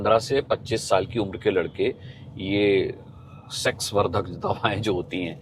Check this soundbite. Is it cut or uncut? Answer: uncut